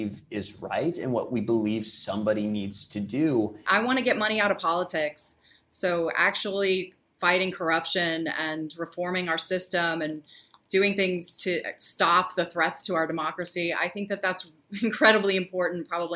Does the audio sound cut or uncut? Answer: cut